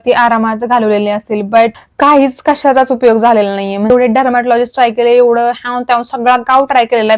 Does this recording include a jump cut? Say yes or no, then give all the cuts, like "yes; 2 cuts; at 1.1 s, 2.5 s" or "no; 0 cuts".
yes; 2 cuts; at 1.8 s, 3.9 s